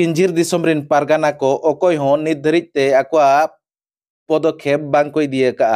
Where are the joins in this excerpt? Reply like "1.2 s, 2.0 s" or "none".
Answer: none